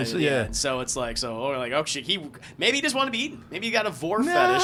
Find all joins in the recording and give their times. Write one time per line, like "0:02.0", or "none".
none

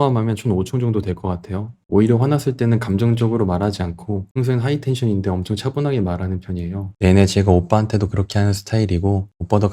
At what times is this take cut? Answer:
0:01.7
0:06.9

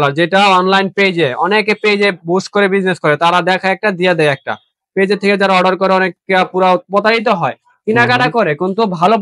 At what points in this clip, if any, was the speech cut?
none

